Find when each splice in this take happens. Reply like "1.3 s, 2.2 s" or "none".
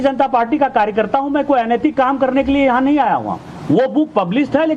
none